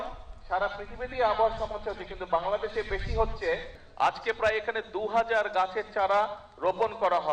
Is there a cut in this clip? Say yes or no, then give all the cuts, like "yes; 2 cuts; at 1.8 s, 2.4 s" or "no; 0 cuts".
yes; 1 cut; at 3.8 s